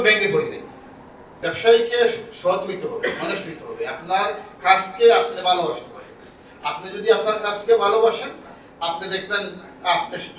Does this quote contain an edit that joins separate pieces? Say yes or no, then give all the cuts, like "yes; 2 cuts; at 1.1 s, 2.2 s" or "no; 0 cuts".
yes; 1 cut; at 1.4 s